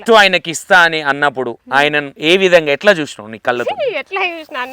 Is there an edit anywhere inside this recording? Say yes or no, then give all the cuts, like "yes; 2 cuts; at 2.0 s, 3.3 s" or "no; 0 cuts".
yes; 2 cuts; at 2.1 s, 2.8 s